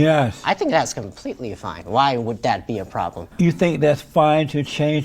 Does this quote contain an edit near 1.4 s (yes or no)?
no